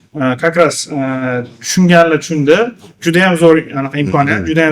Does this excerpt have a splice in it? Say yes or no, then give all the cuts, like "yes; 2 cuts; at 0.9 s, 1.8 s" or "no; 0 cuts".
no; 0 cuts